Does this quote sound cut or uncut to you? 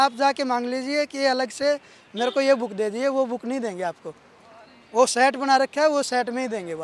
uncut